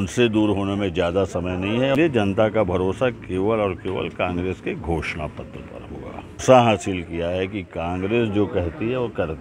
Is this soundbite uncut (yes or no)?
no